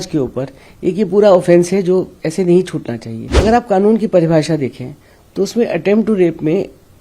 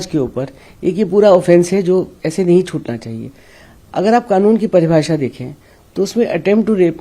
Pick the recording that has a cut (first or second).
first